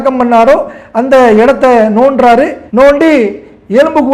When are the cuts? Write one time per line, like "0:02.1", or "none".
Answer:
0:02.6